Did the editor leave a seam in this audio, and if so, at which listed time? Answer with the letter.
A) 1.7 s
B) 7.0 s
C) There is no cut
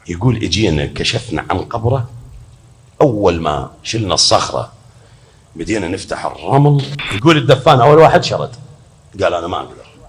B